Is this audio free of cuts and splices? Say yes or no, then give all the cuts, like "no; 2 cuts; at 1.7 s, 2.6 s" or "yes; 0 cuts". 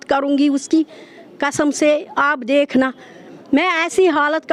yes; 0 cuts